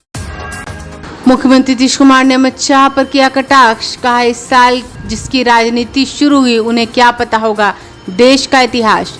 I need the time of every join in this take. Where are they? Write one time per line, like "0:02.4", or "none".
0:01.0